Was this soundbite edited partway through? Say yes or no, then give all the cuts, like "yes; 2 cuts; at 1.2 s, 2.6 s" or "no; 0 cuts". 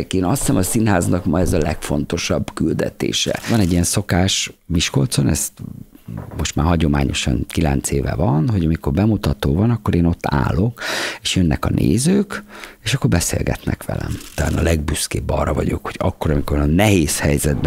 yes; 2 cuts; at 3.5 s, 14.3 s